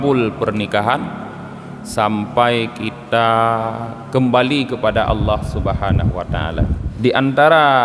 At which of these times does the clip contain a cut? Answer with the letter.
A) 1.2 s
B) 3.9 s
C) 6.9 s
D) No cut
C